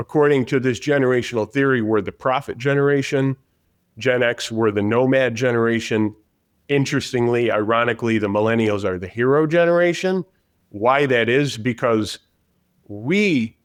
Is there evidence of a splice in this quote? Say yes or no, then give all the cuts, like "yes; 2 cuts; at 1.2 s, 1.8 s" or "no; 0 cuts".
no; 0 cuts